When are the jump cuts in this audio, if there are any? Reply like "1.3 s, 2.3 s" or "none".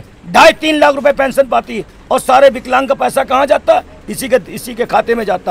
none